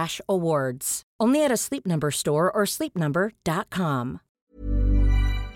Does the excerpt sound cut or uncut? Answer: cut